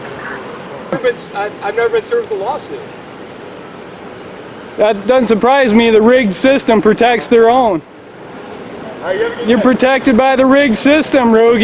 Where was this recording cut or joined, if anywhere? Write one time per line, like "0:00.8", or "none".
0:00.9